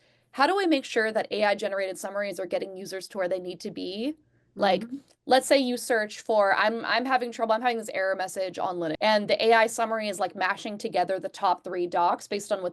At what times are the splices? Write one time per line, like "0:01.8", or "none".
0:09.0